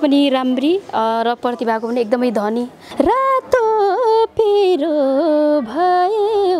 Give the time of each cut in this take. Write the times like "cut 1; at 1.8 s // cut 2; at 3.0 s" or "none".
cut 1; at 2.8 s